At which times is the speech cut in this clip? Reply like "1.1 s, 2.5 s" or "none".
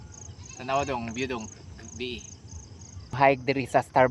3.1 s